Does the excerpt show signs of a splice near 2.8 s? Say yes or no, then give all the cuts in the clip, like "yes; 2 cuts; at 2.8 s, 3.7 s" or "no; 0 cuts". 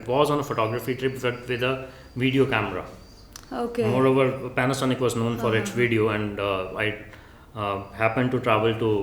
no; 0 cuts